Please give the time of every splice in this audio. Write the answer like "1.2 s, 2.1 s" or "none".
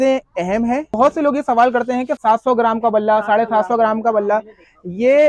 1.0 s, 2.1 s